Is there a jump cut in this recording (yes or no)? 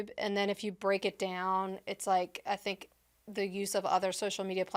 no